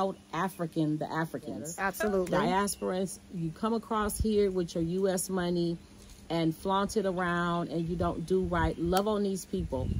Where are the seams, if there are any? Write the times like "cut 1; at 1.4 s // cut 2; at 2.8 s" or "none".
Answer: cut 1; at 1.8 s